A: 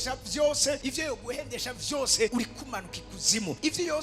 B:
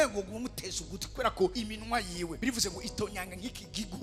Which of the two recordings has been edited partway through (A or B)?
A